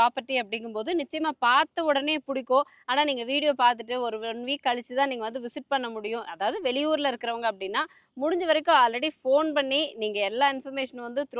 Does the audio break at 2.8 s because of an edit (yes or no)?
no